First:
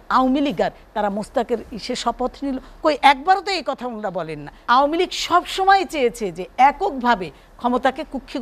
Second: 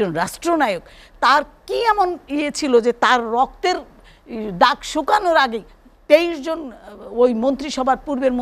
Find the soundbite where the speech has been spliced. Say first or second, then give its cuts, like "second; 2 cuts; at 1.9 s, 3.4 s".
first; 1 cut; at 4.6 s